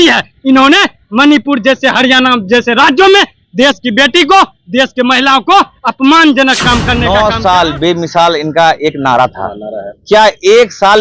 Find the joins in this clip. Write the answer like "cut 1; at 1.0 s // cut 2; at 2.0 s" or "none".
cut 1; at 7.0 s